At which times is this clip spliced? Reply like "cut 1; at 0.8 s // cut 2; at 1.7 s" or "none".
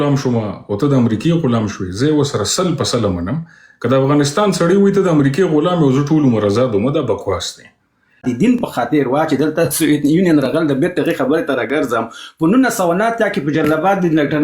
cut 1; at 8.0 s